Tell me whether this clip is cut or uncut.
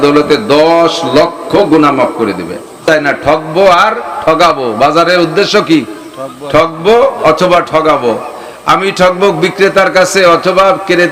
uncut